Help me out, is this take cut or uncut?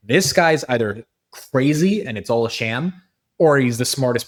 uncut